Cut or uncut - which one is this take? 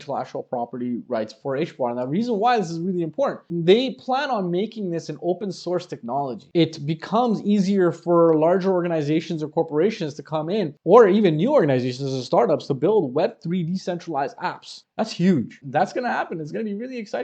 cut